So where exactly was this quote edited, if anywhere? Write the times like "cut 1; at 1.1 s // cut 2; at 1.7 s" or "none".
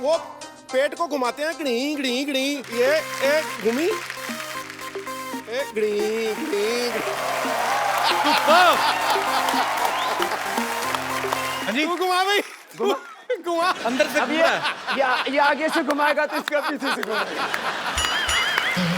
cut 1; at 2.7 s // cut 2; at 11.6 s